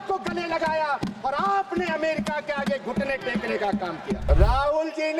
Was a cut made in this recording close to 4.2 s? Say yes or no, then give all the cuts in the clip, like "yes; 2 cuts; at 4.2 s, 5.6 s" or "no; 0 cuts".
yes; 1 cut; at 4.2 s